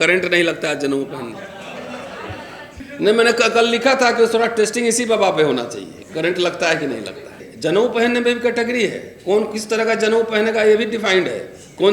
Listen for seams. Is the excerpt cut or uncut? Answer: cut